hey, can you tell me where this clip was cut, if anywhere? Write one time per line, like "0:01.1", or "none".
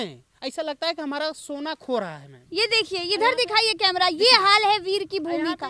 0:02.4